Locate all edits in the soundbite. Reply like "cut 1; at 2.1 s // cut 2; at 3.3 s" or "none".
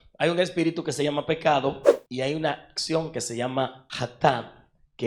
cut 1; at 3.8 s